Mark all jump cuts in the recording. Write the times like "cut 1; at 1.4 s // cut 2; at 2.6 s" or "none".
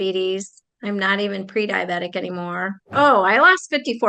cut 1; at 2.9 s